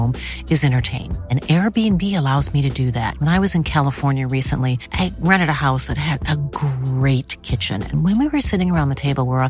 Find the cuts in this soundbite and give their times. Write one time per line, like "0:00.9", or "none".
none